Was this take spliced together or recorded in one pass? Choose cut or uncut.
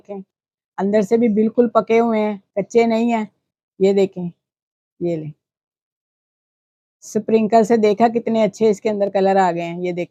uncut